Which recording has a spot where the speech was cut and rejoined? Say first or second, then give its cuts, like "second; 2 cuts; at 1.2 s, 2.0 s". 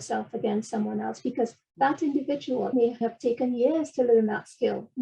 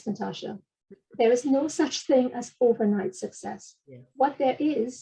first; 2 cuts; at 1.6 s, 3.0 s